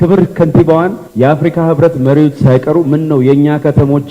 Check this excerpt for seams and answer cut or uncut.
uncut